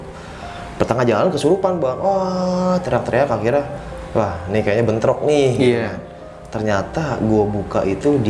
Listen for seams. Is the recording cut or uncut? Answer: uncut